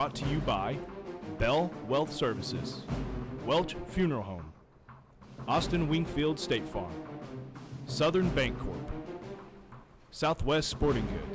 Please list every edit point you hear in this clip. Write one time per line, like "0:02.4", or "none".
none